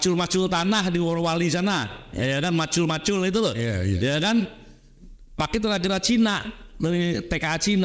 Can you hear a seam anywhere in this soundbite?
no; 0 cuts

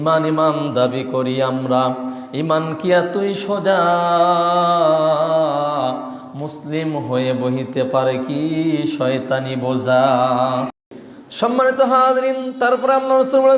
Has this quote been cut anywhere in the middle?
yes; 1 cut; at 10.9 s

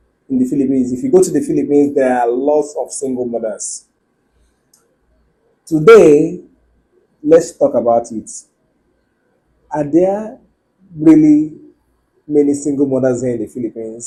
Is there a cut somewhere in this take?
no; 0 cuts

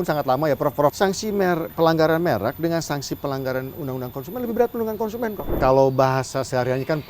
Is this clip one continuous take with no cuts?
no; 2 cuts; at 0.9 s, 5.5 s

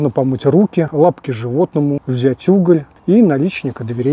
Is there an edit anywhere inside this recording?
yes; 3 cuts; at 0.9 s, 2.1 s, 2.9 s

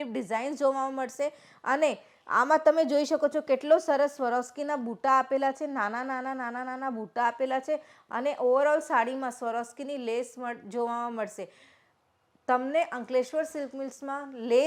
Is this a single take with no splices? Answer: yes; 0 cuts

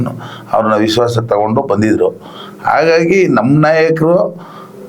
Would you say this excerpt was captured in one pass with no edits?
yes; 0 cuts

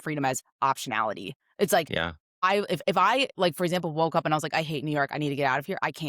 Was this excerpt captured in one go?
yes; 0 cuts

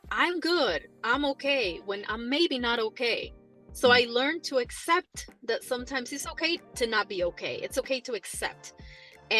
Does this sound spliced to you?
no; 0 cuts

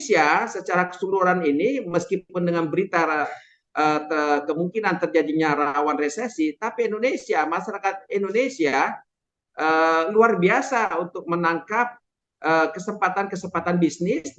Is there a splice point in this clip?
no; 0 cuts

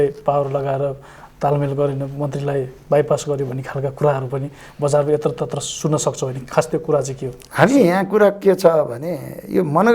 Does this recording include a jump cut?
no; 0 cuts

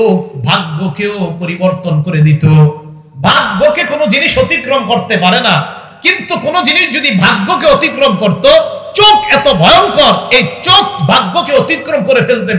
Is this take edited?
no; 0 cuts

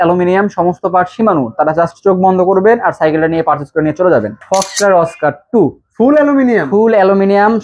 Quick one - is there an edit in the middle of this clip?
yes; 1 cut; at 4.4 s

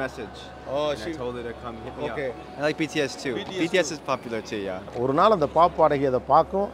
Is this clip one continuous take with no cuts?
no; 2 cuts; at 2.5 s, 4.8 s

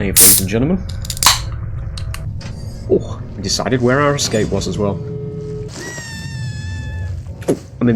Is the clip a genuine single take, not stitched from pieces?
no; 2 cuts; at 2.2 s, 5.7 s

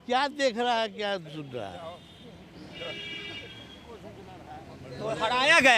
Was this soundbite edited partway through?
no; 0 cuts

